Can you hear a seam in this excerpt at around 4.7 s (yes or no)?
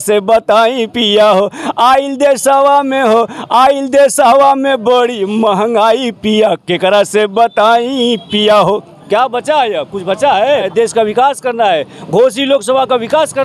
no